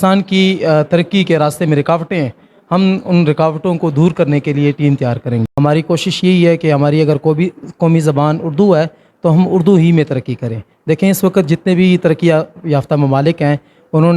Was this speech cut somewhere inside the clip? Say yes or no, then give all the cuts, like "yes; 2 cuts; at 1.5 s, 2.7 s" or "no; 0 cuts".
yes; 1 cut; at 5.5 s